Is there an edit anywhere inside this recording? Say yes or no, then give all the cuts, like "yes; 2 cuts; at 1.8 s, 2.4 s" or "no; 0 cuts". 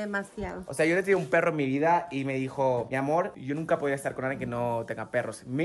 no; 0 cuts